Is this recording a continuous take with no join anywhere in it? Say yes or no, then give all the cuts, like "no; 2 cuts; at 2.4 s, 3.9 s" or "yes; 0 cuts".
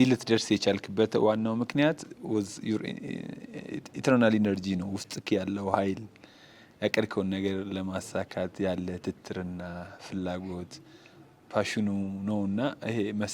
yes; 0 cuts